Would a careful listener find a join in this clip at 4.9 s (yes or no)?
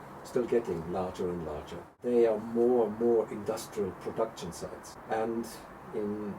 yes